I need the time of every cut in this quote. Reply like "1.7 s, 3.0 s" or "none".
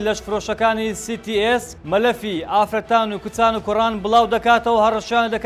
1.7 s